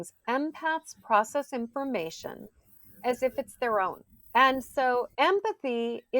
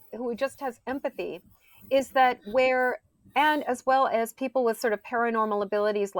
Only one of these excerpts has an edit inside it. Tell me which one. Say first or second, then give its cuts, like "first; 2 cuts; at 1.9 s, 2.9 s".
first; 1 cut; at 5.2 s